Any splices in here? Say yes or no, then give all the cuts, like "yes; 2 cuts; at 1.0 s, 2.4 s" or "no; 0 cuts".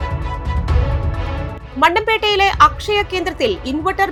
no; 0 cuts